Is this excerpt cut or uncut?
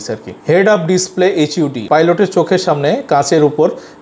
cut